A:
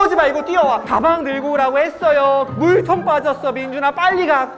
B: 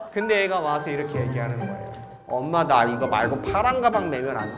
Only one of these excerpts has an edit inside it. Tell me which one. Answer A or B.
A